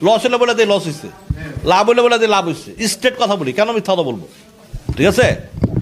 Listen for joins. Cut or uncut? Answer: uncut